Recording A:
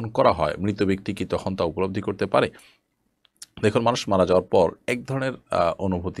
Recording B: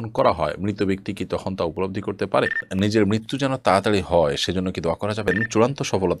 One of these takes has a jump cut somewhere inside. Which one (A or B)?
B